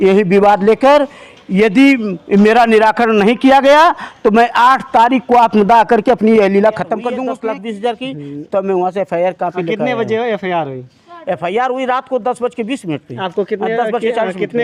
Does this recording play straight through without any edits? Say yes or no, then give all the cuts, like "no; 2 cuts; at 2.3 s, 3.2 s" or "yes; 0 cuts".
no; 1 cut; at 7.1 s